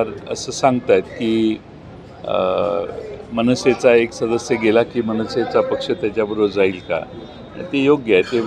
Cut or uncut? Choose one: uncut